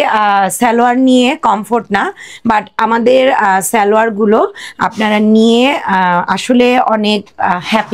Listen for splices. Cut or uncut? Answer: uncut